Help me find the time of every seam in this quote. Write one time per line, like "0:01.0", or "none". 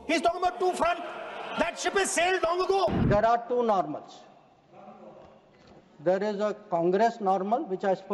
0:03.0